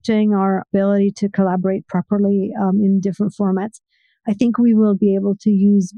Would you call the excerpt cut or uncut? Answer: uncut